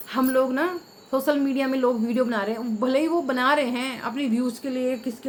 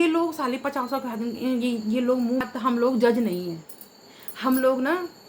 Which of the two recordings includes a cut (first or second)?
second